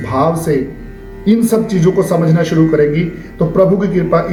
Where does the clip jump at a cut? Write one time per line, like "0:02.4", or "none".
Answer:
none